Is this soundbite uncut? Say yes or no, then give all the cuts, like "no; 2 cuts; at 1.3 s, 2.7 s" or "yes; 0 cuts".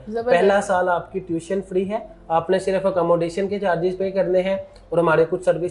yes; 0 cuts